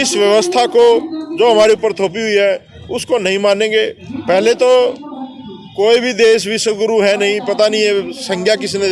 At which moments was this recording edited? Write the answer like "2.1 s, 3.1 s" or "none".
4.1 s